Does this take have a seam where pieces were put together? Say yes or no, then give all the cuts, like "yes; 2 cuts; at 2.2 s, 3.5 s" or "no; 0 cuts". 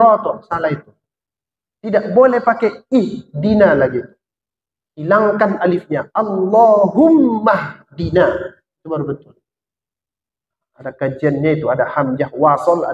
no; 0 cuts